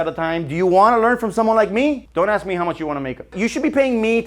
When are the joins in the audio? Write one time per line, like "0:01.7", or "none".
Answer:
0:02.0
0:03.3

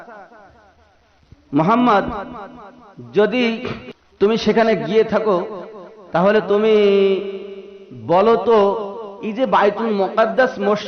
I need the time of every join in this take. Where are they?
0:03.8

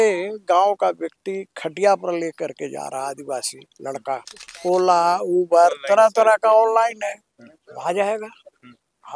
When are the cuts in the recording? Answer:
0:04.5

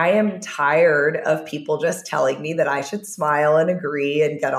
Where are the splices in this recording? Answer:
none

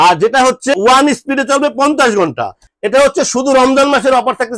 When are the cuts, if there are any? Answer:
0:02.6

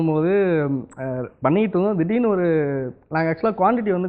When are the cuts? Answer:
none

